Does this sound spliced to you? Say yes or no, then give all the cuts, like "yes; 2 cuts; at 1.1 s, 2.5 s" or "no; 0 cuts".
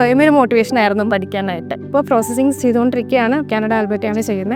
yes; 1 cut; at 1.8 s